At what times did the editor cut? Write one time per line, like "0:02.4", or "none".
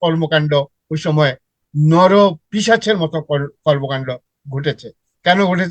0:02.4